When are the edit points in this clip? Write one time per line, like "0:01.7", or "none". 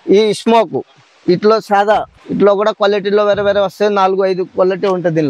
0:02.2